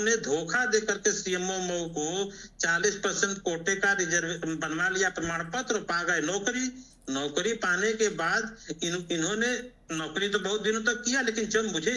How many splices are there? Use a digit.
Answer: 0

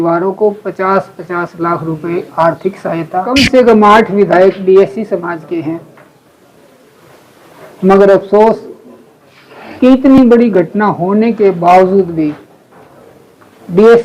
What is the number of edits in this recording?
1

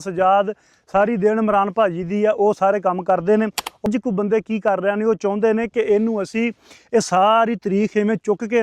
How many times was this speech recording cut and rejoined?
1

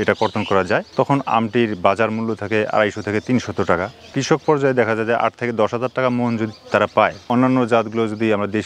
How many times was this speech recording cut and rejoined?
2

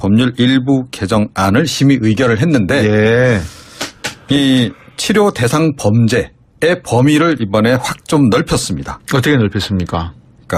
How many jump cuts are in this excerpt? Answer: 1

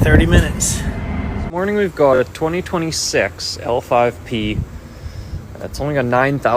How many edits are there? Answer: 1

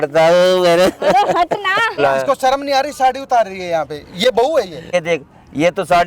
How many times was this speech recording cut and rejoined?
2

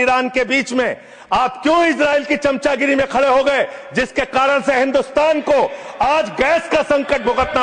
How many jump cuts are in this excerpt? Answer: 0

